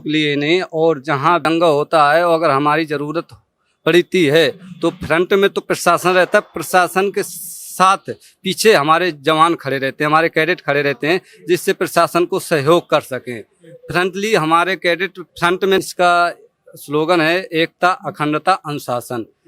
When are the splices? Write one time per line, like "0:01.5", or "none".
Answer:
0:01.4
0:15.8